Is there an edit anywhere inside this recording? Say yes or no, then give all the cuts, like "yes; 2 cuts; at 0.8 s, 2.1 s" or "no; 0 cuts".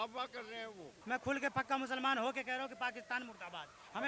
yes; 1 cut; at 1.0 s